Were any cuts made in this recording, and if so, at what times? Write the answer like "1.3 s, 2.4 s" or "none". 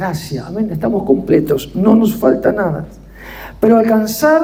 none